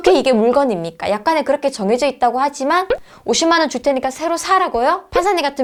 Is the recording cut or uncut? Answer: uncut